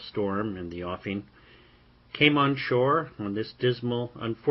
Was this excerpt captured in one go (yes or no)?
no